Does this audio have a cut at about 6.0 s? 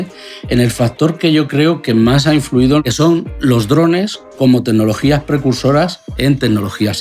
yes; 2 cuts; at 2.8 s, 6.0 s

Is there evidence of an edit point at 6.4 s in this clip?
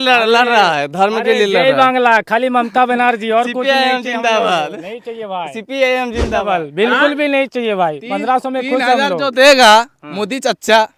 yes; 1 cut; at 6.4 s

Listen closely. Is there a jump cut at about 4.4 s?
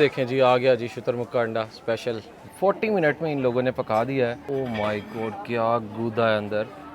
yes; 2 cuts; at 2.4 s, 4.4 s

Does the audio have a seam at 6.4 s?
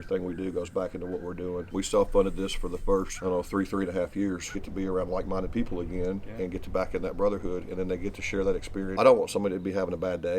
no; 4 cuts; at 1.7 s, 3.1 s, 4.6 s, 8.9 s

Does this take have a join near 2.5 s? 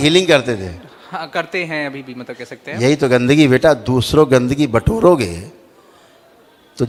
no; 0 cuts

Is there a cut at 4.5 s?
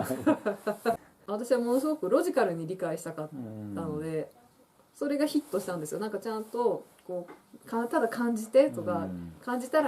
yes; 2 cuts; at 1.0 s, 4.5 s

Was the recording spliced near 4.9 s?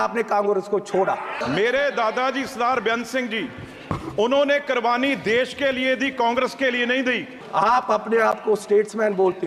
no; 2 cuts; at 1.4 s, 7.3 s

